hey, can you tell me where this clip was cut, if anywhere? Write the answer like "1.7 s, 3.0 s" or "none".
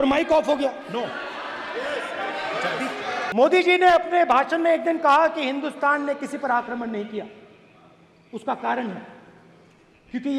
3.3 s